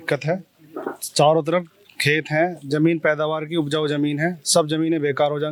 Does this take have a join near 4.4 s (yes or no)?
no